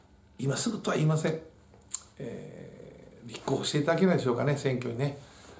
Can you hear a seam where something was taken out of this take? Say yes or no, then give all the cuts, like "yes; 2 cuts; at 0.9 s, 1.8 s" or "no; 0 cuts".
no; 0 cuts